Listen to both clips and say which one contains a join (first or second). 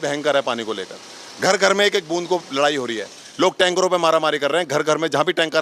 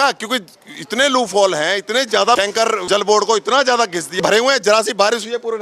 second